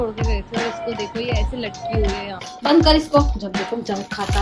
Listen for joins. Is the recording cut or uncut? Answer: cut